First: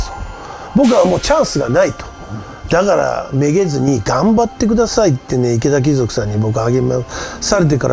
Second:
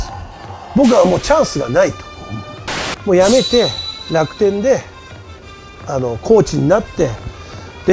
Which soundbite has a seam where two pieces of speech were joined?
second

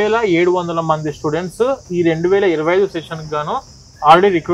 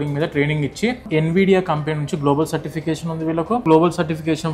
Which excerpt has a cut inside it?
second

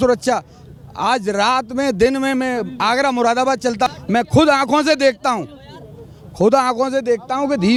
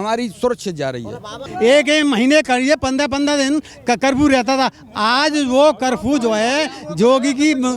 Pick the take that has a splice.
second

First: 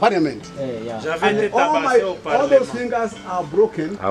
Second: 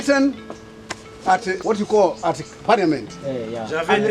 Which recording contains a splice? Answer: second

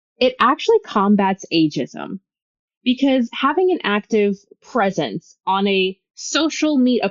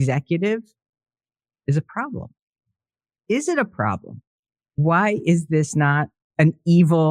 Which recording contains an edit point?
second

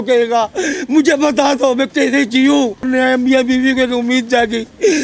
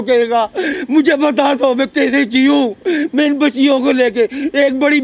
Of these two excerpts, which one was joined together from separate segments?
first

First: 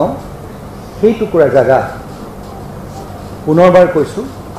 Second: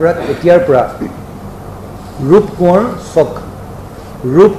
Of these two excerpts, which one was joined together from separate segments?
second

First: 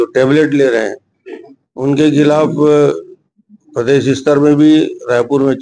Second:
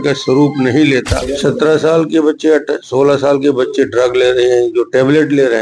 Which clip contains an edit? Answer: second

